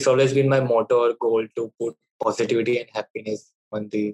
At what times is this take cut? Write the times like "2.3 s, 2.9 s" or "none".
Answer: none